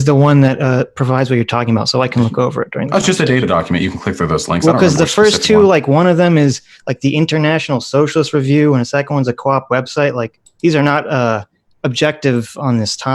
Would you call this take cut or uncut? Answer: uncut